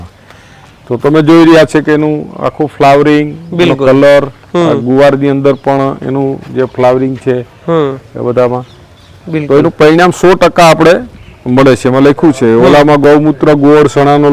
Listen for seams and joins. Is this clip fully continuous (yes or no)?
yes